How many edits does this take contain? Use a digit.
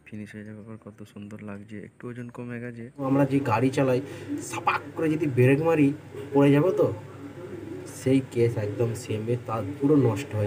1